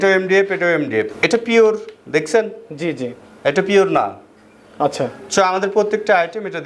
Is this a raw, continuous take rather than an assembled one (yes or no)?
no